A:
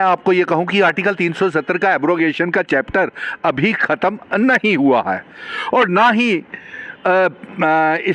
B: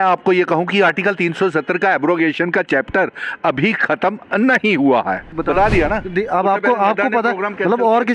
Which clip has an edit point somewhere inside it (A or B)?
B